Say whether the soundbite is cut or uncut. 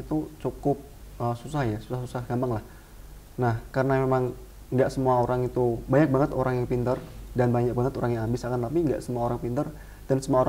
uncut